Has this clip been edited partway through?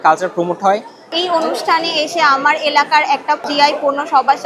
yes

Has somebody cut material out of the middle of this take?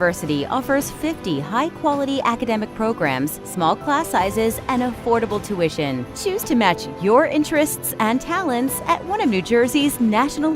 no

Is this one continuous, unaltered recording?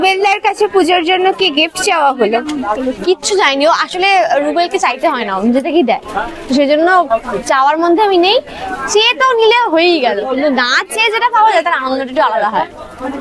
yes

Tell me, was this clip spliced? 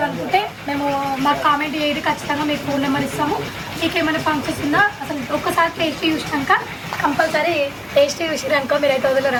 no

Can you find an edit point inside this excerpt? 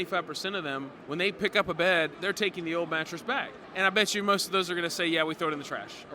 yes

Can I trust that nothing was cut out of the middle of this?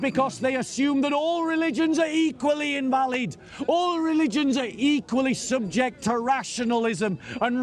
yes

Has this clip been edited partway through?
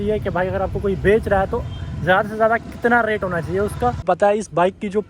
yes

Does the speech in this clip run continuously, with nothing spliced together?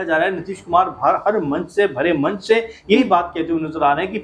yes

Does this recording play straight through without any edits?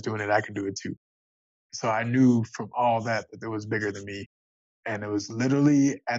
no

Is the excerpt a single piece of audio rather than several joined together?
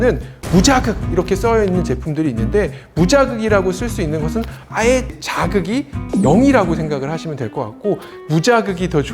no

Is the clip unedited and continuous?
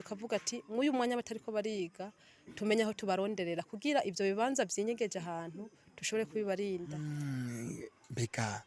no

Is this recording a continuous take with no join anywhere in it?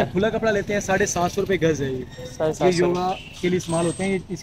yes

